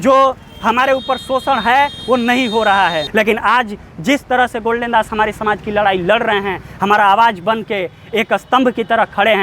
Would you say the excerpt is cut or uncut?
cut